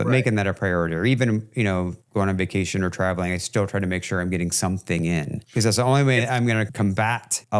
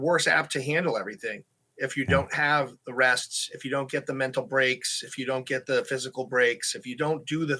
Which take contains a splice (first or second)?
first